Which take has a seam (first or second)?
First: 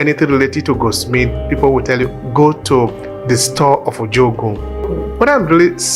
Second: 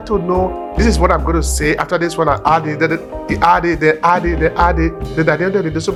first